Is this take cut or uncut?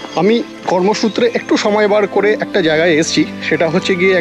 uncut